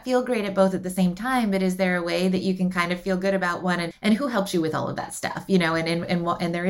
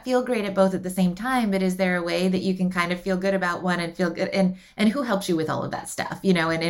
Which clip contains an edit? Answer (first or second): first